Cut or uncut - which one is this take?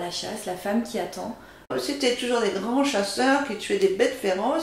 cut